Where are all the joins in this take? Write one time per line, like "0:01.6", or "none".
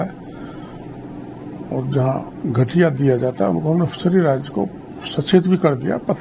none